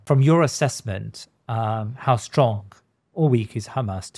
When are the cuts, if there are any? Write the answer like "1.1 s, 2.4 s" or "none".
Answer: none